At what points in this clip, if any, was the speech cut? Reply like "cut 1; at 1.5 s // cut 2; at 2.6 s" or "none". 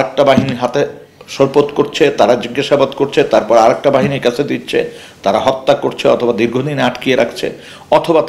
none